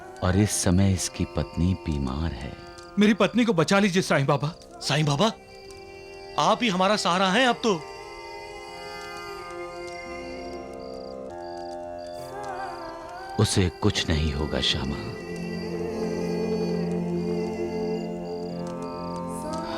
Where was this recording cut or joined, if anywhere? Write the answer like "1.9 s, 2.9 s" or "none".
none